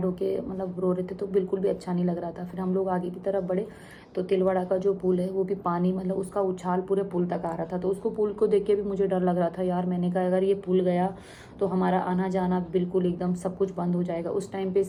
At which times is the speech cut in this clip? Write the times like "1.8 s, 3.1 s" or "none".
none